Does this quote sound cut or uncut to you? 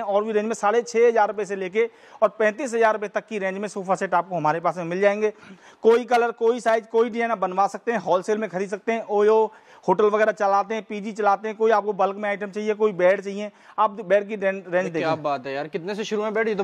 uncut